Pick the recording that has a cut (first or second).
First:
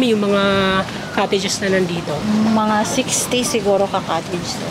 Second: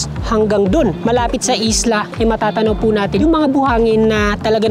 second